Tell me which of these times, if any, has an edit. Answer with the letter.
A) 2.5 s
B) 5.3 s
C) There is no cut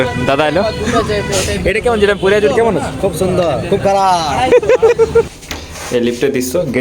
B